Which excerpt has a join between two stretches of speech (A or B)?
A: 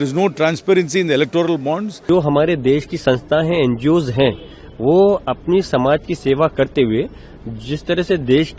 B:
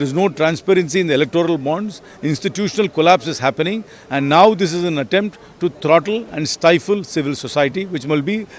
A